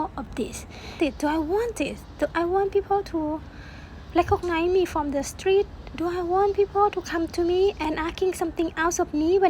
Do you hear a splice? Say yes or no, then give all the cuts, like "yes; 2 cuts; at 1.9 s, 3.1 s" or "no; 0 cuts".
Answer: yes; 2 cuts; at 1.0 s, 7.8 s